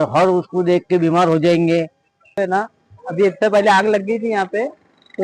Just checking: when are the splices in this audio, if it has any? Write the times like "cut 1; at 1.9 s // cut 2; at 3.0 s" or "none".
cut 1; at 2.4 s

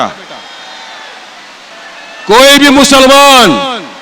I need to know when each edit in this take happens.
cut 1; at 1.7 s

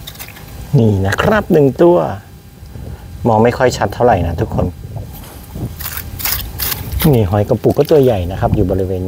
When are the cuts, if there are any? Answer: none

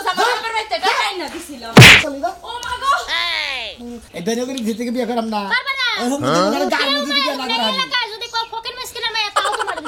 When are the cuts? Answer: cut 1; at 4.0 s

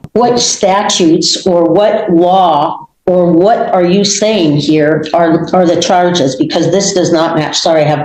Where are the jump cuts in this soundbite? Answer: none

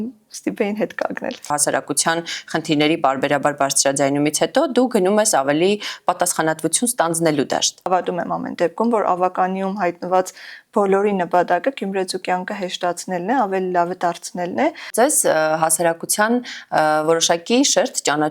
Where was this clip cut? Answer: cut 1; at 1.5 s // cut 2; at 7.9 s // cut 3; at 14.9 s

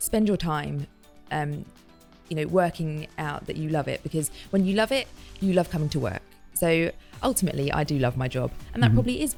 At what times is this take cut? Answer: none

